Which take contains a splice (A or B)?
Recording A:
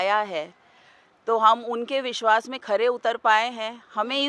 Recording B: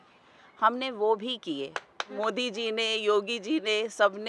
B